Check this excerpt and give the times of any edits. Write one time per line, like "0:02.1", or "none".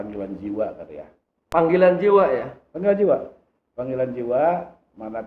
0:01.4